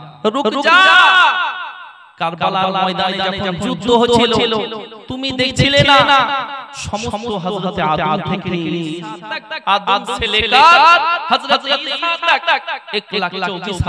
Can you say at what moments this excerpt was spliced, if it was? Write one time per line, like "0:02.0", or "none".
none

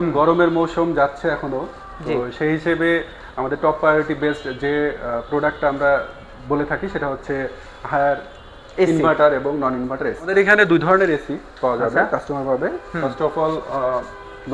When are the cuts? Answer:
0:10.3

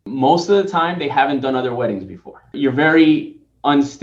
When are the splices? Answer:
0:02.6

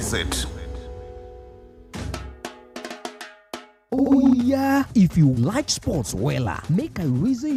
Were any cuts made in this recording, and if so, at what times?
none

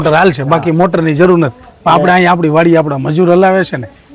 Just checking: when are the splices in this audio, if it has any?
none

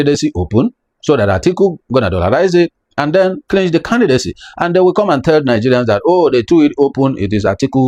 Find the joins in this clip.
none

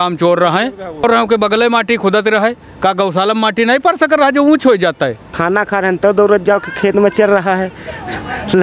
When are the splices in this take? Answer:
0:01.0
0:05.3

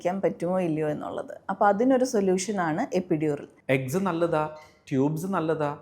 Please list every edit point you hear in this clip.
0:03.5

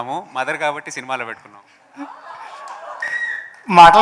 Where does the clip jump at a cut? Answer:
0:03.0

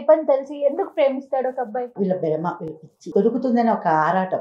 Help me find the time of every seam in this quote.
0:01.9
0:03.1

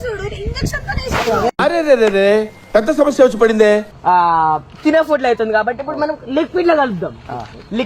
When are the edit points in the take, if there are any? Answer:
0:03.9

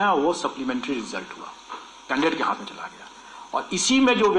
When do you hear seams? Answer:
0:02.0

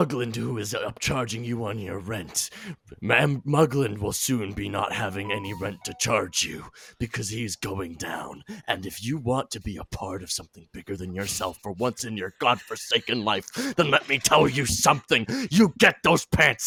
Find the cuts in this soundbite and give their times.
none

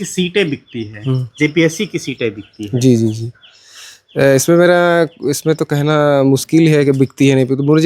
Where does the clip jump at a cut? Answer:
none

